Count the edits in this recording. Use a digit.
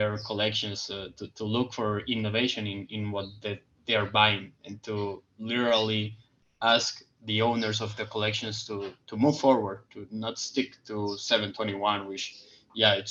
0